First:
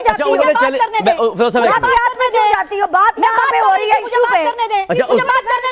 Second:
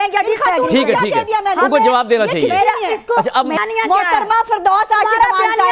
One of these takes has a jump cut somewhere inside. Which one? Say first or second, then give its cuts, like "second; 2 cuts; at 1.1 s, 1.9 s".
second; 1 cut; at 3.6 s